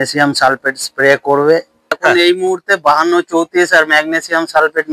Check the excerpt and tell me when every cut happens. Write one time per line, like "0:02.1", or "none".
0:02.0